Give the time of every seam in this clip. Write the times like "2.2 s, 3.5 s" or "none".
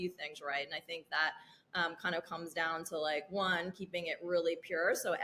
none